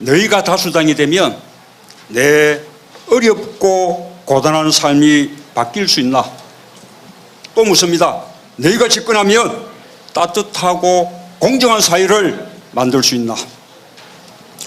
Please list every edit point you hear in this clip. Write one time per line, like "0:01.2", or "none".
0:12.1